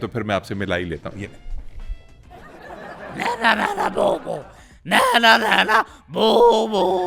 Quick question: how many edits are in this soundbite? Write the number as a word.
zero